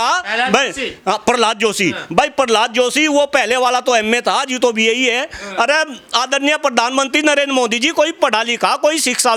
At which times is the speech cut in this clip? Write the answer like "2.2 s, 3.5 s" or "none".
none